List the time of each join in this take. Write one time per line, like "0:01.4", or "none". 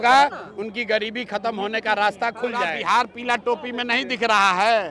0:02.7